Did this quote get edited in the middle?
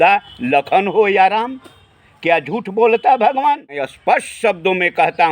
yes; 1 cut; at 3.9 s

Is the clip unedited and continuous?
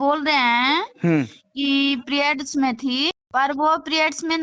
yes; 0 cuts

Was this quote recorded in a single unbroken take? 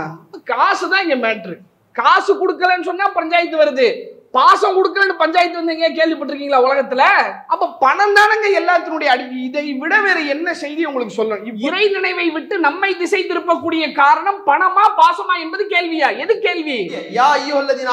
no; 3 cuts; at 7.4 s, 11.5 s, 17.1 s

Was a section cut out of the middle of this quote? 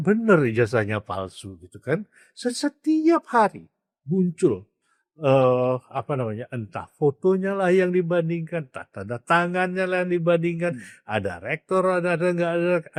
no; 0 cuts

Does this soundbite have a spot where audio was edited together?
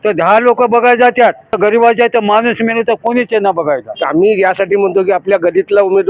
yes; 2 cuts; at 1.5 s, 4.0 s

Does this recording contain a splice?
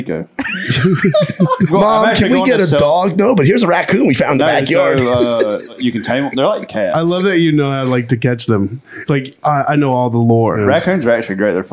yes; 3 cuts; at 1.7 s, 5.8 s, 10.6 s

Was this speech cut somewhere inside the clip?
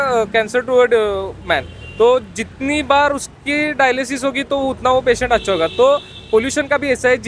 no; 0 cuts

